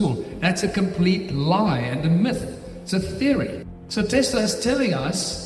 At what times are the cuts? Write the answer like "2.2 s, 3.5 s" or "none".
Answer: 3.6 s